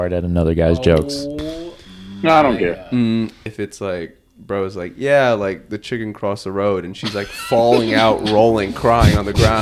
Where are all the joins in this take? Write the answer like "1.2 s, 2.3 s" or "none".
3.4 s

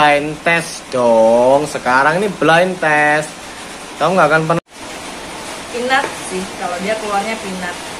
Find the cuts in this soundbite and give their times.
4.6 s

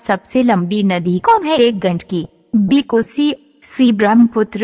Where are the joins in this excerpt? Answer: 1.2 s

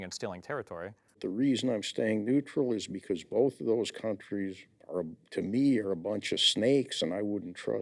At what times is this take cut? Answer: 1.2 s

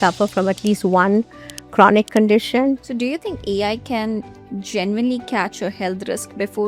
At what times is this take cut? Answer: 2.8 s

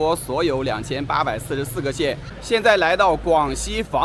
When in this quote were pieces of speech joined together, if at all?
2.4 s

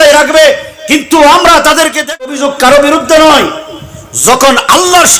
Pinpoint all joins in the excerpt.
2.3 s

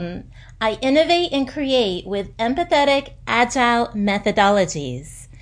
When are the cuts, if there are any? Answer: none

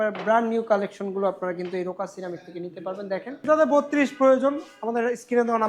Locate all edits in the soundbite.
3.4 s

